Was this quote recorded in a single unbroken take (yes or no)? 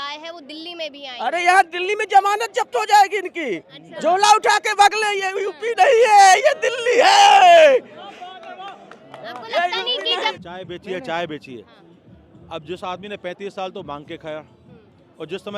no